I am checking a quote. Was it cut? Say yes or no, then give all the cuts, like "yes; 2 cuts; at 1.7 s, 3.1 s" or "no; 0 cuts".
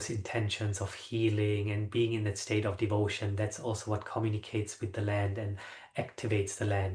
no; 0 cuts